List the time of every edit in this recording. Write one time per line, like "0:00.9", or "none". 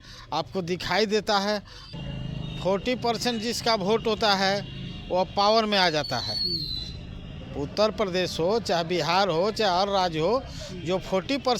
0:02.0